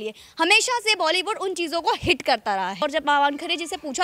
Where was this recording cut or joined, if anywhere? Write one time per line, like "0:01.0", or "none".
0:02.8